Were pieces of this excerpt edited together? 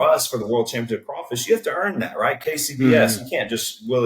no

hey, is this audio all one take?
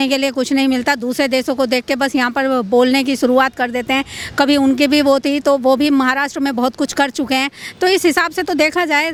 yes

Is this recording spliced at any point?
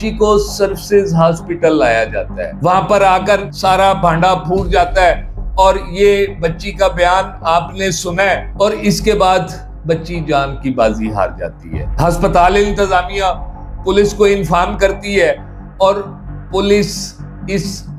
no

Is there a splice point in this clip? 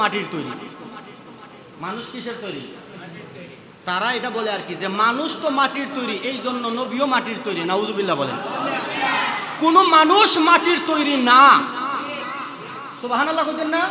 no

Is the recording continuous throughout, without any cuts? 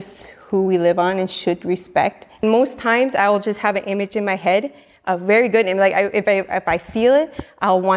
no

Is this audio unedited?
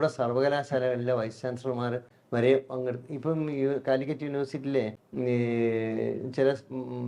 no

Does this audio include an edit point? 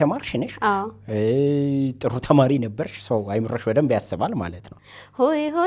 yes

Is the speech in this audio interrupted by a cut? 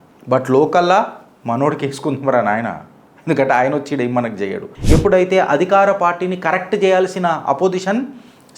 yes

